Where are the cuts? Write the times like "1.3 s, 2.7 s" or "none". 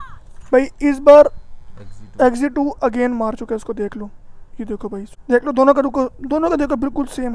5.0 s